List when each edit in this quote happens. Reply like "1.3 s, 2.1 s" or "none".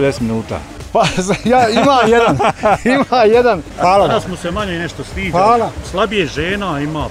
3.7 s